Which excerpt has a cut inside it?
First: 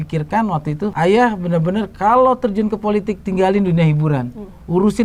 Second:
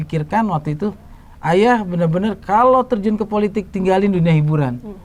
first; 1 cut; at 0.9 s

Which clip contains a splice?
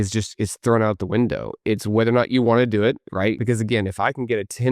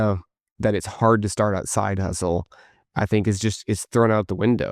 first; 1 cut; at 3.4 s

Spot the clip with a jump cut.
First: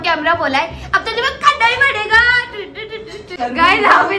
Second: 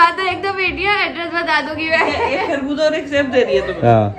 first; 1 cut; at 3.2 s

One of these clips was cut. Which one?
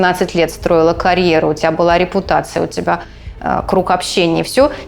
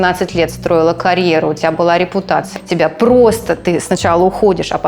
second; 1 cut; at 2.6 s

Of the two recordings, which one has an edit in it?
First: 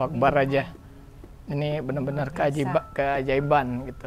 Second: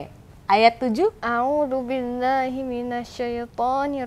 second; 1 cut; at 1.2 s

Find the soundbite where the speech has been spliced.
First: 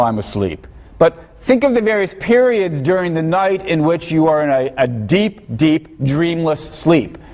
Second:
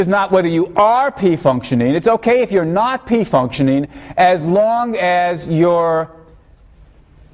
second; 1 cut; at 2.4 s

